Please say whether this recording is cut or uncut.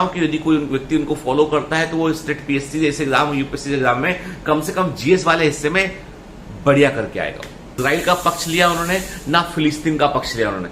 cut